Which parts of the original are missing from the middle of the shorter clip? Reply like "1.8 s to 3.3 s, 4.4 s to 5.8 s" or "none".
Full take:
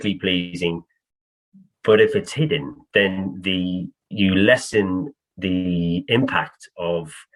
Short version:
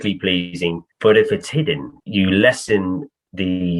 0.9 s to 1.7 s, 2.8 s to 4.0 s